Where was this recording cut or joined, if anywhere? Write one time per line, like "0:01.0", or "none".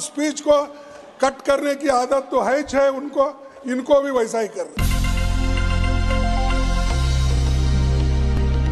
0:04.8